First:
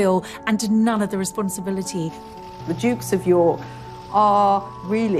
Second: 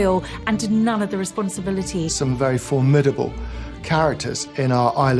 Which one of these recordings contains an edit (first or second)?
second